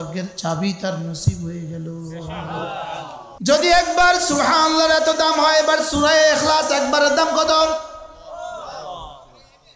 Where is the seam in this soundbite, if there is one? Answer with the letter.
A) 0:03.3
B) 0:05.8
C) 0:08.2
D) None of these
A